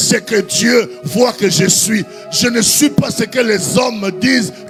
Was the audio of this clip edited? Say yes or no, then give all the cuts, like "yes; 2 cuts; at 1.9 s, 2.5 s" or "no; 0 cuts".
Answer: no; 0 cuts